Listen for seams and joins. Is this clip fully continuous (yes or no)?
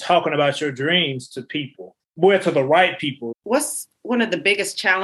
no